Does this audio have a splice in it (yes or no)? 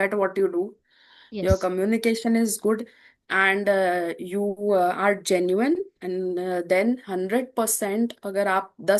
no